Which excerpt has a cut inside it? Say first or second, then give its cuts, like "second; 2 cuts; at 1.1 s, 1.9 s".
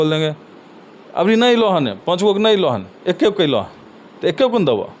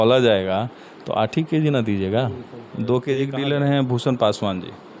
second; 1 cut; at 3.3 s